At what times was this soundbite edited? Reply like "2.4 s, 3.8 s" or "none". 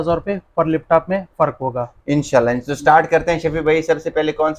none